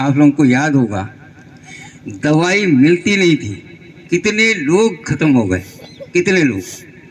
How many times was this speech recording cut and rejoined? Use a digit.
0